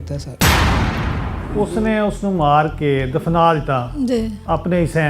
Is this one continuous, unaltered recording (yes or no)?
no